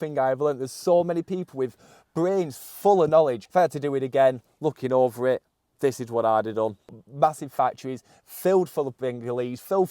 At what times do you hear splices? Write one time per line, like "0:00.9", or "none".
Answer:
0:03.4
0:07.0

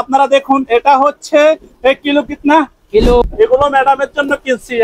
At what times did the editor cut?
0:03.2

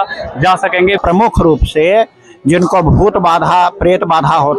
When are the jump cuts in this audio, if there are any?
0:01.0

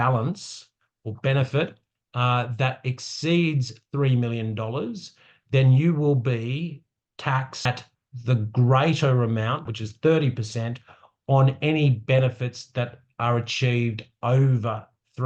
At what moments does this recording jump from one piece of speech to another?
0:09.6

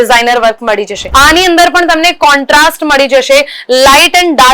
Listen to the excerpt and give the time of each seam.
0:01.0

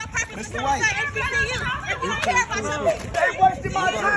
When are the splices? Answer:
0:03.2

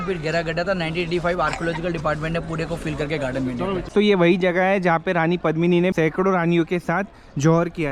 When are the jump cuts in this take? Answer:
0:03.9
0:05.9

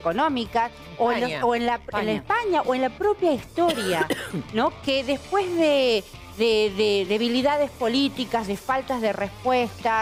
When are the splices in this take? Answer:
none

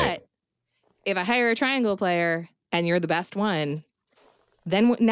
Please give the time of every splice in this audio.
none

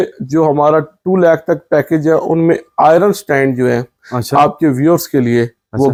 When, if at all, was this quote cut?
none

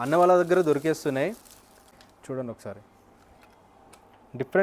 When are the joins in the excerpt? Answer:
0:01.8

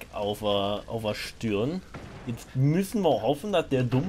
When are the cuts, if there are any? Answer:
none

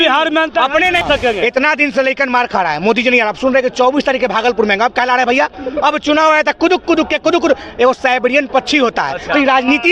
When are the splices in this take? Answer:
0:01.0

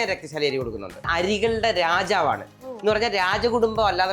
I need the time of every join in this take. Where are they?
0:01.0

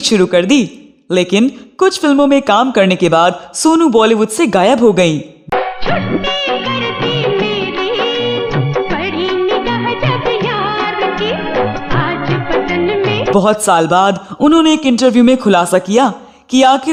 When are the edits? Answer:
none

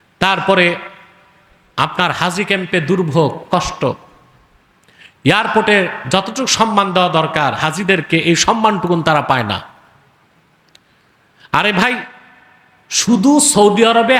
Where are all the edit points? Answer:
none

